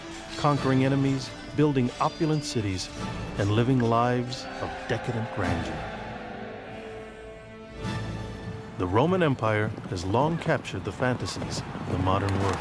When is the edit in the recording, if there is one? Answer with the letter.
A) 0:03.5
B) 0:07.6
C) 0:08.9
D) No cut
A